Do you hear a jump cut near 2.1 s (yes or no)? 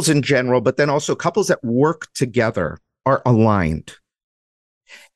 no